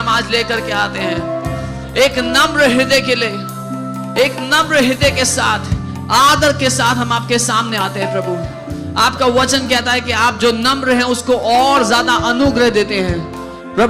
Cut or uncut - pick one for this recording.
uncut